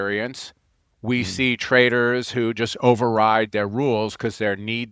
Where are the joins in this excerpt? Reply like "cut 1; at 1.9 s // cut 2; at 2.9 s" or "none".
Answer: none